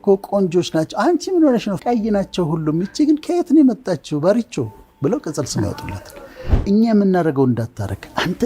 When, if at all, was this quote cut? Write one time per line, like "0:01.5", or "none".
0:06.5